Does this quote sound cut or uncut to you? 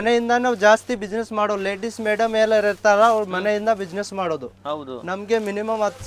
uncut